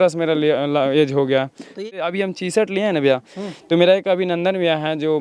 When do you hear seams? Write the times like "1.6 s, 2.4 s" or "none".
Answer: 1.8 s